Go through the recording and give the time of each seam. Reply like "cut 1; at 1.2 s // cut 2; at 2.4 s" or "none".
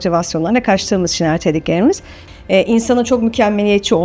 cut 1; at 2.2 s